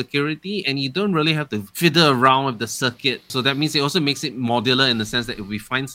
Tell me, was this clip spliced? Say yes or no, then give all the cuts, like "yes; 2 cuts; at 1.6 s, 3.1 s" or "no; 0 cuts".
yes; 2 cuts; at 1.7 s, 3.3 s